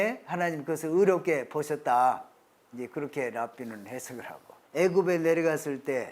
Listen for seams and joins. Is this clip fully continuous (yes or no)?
no